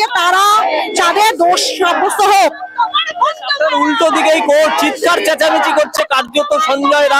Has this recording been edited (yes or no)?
no